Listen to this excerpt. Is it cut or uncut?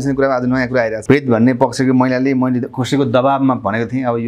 cut